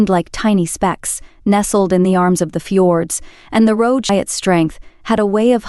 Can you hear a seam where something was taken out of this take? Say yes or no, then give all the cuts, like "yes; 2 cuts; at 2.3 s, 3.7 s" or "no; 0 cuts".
yes; 1 cut; at 4.1 s